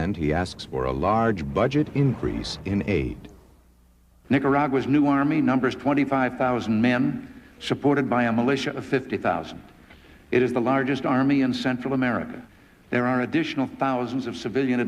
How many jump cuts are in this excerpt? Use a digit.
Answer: 1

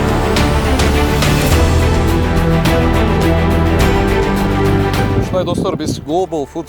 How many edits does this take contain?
1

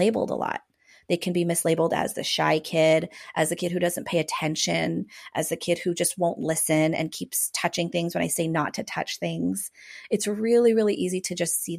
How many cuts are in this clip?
0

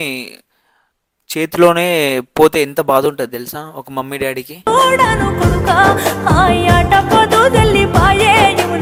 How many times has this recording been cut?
0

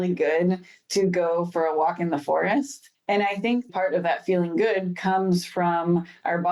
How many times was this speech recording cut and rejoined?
1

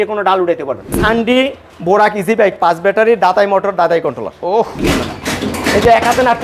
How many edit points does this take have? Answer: 2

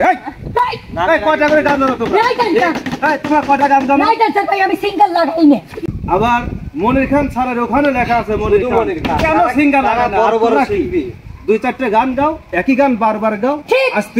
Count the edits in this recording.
1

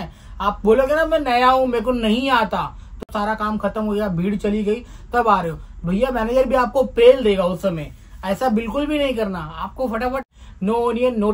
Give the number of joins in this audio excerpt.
2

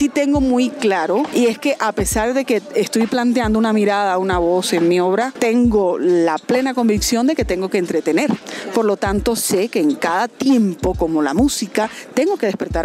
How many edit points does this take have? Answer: 3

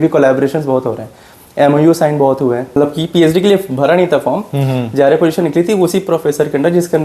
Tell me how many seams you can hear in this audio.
1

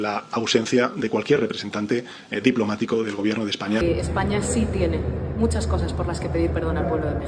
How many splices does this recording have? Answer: 1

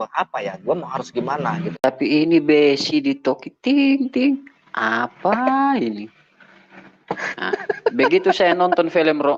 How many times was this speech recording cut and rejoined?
1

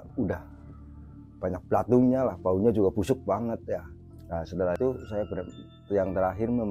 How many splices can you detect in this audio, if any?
1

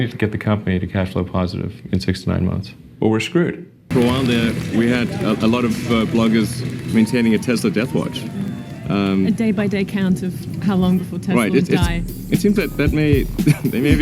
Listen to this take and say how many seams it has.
1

